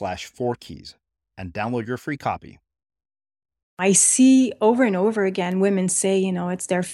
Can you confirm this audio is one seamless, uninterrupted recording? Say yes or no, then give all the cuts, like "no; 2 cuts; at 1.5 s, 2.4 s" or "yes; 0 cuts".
no; 1 cut; at 3.8 s